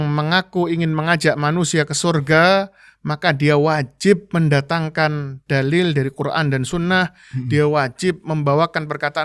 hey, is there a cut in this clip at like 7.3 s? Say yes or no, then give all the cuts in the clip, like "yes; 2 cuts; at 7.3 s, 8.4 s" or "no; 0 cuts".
no; 0 cuts